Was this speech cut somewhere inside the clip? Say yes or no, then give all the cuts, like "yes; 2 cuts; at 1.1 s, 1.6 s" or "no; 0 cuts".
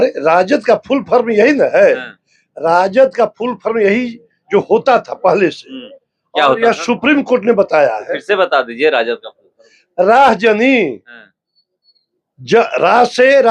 no; 0 cuts